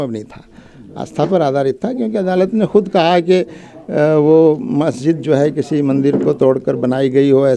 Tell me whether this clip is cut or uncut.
uncut